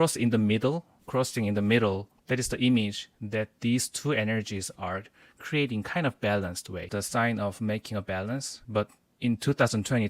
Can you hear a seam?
yes; 4 cuts; at 0.9 s, 2.1 s, 6.8 s, 8.5 s

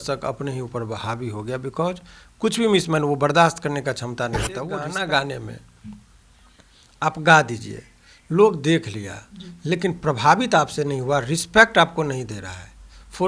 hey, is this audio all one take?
no; 1 cut; at 4.8 s

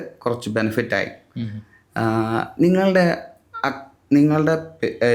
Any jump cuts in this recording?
no; 0 cuts

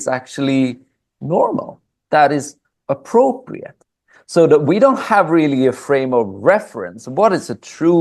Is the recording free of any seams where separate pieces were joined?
yes; 0 cuts

